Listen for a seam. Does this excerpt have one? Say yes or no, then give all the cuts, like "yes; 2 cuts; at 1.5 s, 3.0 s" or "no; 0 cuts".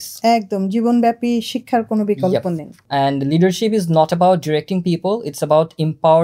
yes; 1 cut; at 2.8 s